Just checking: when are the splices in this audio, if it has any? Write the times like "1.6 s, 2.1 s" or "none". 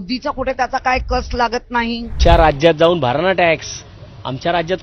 2.1 s